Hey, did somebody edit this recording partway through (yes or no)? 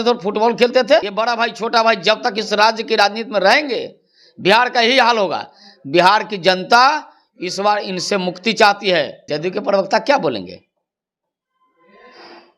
yes